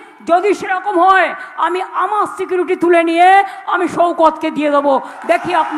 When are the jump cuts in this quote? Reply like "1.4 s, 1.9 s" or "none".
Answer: none